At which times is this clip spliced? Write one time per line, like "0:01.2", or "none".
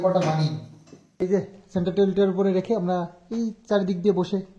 0:01.3